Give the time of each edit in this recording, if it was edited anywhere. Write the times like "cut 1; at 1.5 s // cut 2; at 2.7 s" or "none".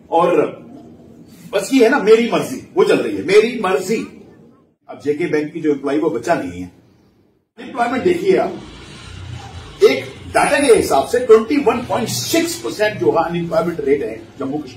cut 1; at 4.9 s // cut 2; at 7.7 s